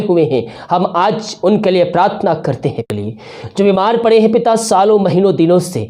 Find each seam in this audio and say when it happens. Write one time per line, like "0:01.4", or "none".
0:02.9